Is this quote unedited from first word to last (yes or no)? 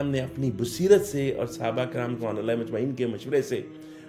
yes